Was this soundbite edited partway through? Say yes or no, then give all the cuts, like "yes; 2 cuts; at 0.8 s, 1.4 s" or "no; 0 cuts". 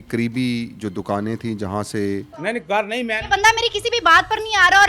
yes; 1 cut; at 2.3 s